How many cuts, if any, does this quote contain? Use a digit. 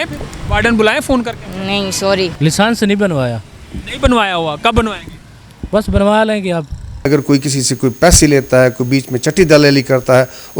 2